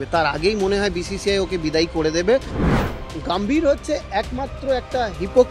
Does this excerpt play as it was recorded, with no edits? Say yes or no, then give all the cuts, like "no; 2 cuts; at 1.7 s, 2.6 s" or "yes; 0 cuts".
no; 1 cut; at 2.8 s